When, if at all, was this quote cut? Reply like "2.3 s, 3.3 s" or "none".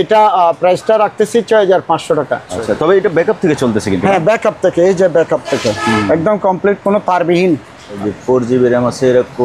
2.4 s, 8.0 s